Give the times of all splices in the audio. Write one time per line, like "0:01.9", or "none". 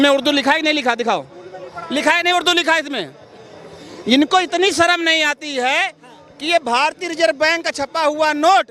none